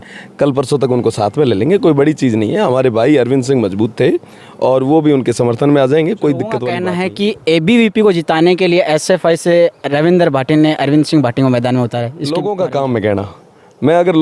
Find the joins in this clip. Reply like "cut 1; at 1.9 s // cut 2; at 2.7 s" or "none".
cut 1; at 6.7 s // cut 2; at 12.2 s